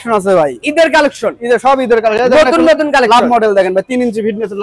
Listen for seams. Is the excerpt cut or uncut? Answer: uncut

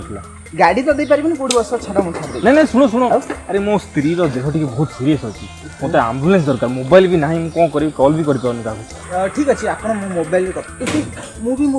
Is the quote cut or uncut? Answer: cut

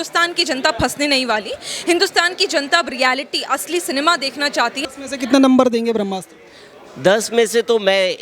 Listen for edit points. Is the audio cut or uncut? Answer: cut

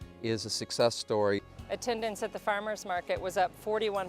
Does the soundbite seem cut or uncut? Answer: cut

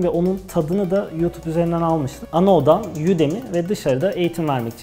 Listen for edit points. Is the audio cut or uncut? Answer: cut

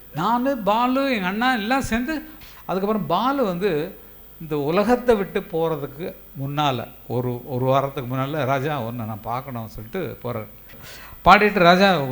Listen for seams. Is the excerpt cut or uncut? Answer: cut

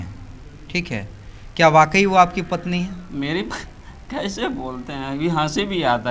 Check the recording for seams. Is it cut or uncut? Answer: uncut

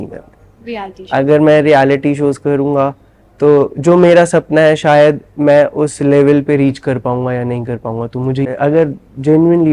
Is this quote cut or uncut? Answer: cut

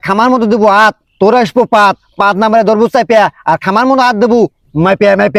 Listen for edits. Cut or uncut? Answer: uncut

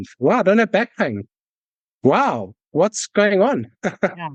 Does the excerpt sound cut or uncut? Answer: uncut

